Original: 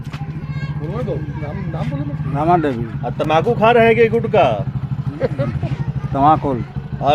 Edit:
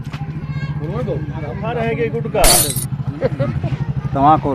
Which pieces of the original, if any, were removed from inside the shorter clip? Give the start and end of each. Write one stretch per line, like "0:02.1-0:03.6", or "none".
0:01.7-0:03.6